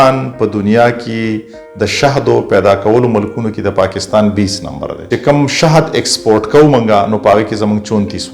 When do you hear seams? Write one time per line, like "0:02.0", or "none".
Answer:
0:05.1